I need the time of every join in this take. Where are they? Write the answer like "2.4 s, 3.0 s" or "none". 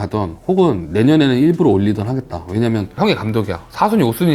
2.9 s